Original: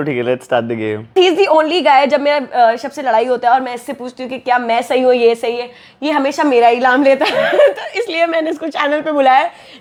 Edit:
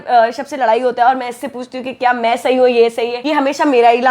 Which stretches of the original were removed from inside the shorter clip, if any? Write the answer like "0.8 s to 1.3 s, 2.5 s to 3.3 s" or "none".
5.6 s to 5.9 s